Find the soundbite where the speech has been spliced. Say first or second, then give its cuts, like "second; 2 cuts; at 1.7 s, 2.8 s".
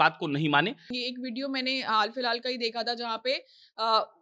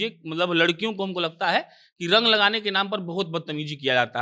first; 1 cut; at 0.9 s